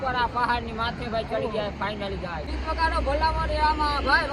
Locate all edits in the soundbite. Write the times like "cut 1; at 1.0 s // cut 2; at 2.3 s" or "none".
cut 1; at 2.5 s